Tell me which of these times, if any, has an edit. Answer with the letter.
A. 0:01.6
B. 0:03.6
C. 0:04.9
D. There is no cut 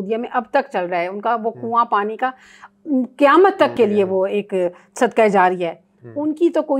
D